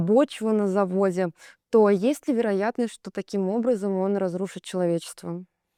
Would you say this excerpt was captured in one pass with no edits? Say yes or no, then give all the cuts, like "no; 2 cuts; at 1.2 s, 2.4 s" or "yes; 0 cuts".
yes; 0 cuts